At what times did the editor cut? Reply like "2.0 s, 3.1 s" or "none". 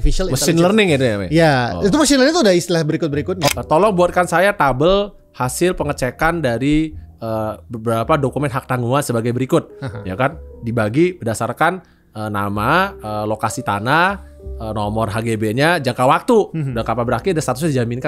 3.5 s